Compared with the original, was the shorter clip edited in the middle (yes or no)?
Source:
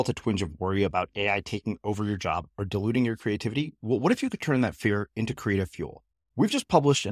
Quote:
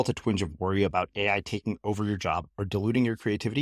no